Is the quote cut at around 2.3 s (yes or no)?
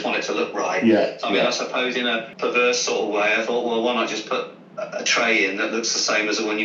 yes